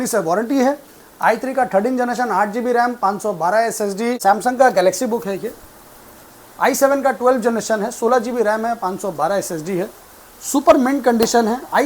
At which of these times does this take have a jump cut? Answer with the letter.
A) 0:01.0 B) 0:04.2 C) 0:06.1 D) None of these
B